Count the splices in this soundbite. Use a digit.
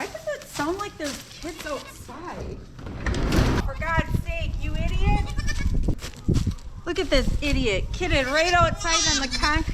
2